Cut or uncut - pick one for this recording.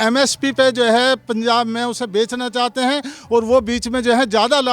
uncut